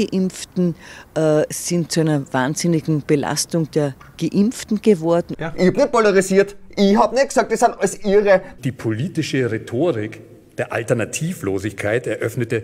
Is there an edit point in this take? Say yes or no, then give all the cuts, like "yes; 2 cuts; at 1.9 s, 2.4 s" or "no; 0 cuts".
yes; 2 cuts; at 5.4 s, 8.5 s